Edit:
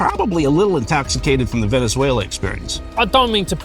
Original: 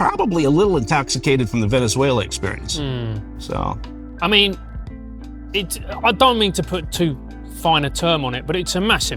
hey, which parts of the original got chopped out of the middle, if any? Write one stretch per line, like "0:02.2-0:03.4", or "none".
0:02.7-0:05.8